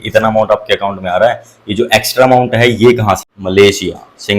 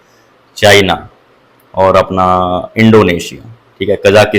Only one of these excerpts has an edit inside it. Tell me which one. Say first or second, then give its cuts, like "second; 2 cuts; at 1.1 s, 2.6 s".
first; 1 cut; at 3.3 s